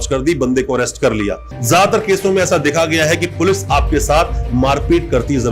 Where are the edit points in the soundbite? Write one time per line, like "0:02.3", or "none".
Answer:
0:01.5